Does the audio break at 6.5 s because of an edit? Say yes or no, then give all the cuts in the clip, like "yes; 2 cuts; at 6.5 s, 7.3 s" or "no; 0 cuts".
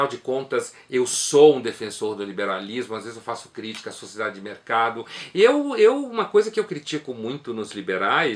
yes; 1 cut; at 6.5 s